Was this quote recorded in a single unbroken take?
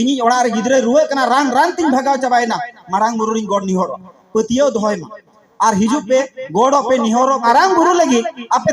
no; 1 cut; at 7.4 s

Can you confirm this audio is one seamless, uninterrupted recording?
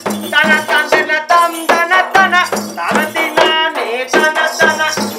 yes; 0 cuts

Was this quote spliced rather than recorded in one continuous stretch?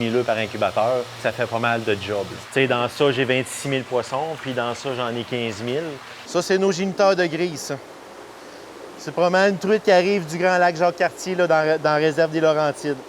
yes; 3 cuts; at 1.2 s, 2.4 s, 6.1 s

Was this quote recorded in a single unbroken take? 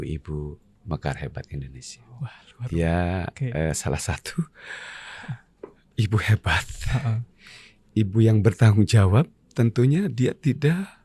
no; 1 cut; at 2.4 s

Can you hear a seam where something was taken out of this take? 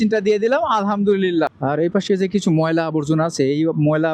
yes; 1 cut; at 1.5 s

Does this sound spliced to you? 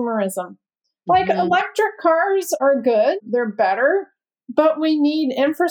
no; 0 cuts

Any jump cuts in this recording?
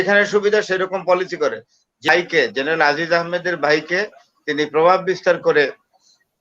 yes; 1 cut; at 2.1 s

